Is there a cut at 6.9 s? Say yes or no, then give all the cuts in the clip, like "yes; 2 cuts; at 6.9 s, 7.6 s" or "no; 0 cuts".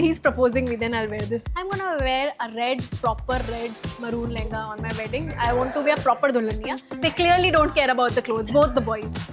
yes; 2 cuts; at 1.5 s, 6.9 s